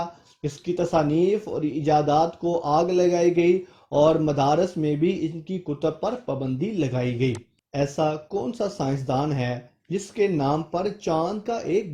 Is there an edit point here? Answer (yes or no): no